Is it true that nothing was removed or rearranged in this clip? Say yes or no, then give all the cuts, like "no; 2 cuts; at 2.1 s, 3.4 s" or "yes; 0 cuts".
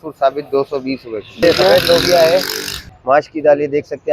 no; 2 cuts; at 1.4 s, 2.9 s